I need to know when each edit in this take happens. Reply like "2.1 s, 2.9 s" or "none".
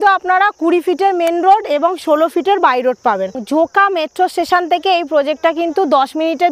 3.4 s